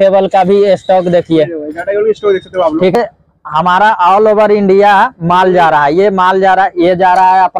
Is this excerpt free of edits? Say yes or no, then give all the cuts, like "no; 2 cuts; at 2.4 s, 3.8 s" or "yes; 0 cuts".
no; 1 cut; at 2.9 s